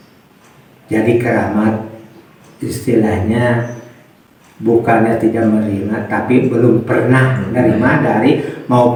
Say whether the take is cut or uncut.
uncut